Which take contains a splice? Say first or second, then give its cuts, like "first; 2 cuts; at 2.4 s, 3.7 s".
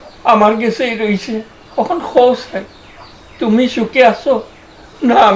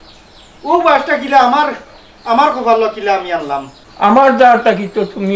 second; 1 cut; at 3.8 s